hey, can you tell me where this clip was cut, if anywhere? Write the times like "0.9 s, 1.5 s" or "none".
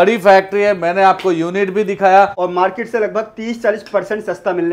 2.3 s

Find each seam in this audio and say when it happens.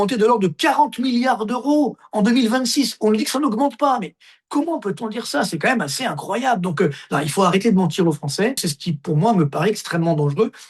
8.7 s

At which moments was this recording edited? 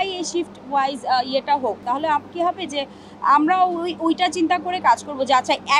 none

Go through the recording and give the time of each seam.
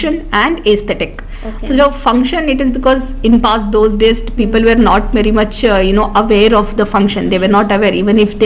none

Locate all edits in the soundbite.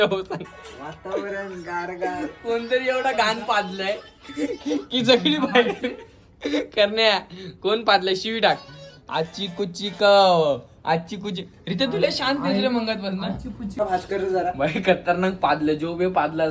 13.8 s

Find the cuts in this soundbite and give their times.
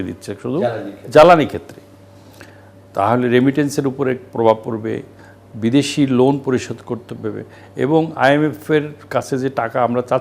none

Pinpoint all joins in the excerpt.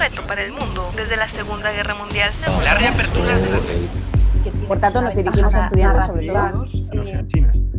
none

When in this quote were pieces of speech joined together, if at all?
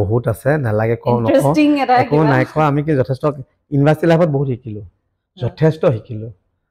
none

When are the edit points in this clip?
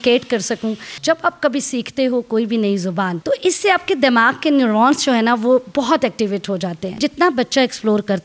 0.9 s, 3.2 s, 6.9 s

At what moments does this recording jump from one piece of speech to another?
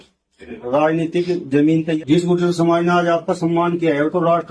2.0 s

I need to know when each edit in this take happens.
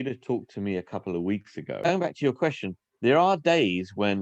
1.9 s

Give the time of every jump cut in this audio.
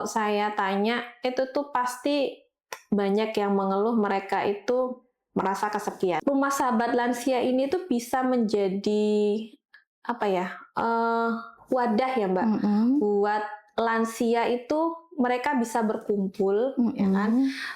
6.2 s

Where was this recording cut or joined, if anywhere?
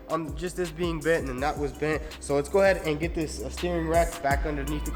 none

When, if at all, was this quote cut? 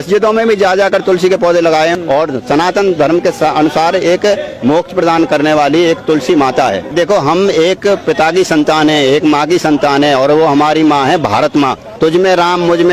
1.9 s, 6.9 s, 11.8 s

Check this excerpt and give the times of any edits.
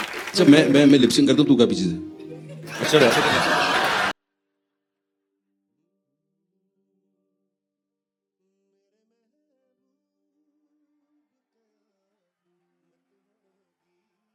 none

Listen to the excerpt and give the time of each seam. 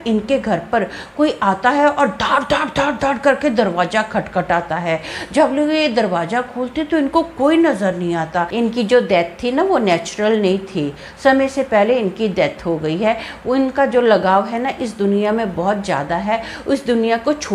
8.5 s

